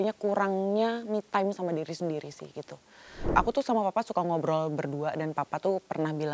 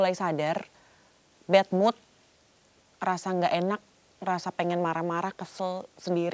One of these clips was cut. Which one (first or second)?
first